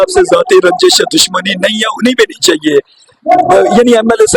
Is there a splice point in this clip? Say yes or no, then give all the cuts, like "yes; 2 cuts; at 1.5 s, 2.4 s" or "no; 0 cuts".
no; 0 cuts